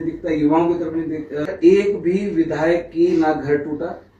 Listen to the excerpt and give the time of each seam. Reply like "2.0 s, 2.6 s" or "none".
1.5 s